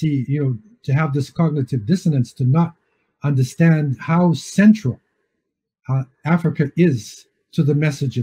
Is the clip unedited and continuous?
yes; 0 cuts

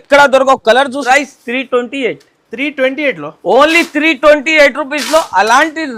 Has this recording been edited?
yes; 1 cut; at 1.0 s

